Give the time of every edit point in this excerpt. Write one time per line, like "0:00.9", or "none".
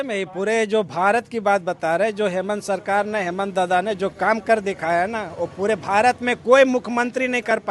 none